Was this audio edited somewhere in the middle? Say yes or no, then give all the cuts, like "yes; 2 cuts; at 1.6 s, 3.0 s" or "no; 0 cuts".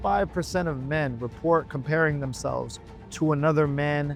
no; 0 cuts